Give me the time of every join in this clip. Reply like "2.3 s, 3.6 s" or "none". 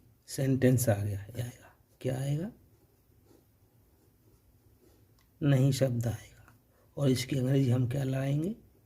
1.4 s

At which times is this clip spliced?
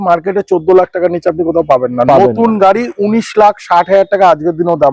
none

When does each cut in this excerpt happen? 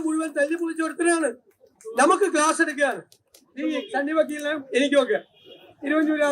none

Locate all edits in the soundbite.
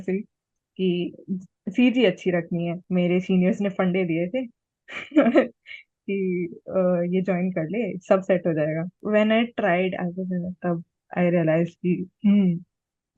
2.8 s, 8.9 s

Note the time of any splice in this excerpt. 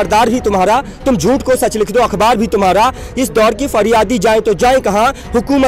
none

